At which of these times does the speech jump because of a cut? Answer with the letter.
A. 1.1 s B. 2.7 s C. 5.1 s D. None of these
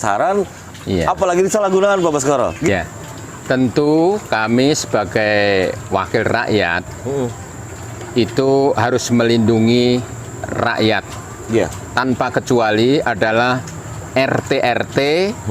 B